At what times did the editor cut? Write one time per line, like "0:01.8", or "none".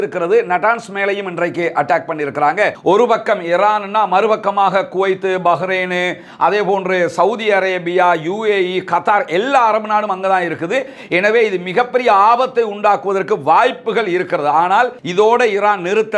0:02.8
0:15.0